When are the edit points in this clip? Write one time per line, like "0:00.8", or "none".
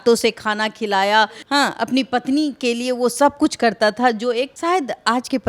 0:01.4
0:04.5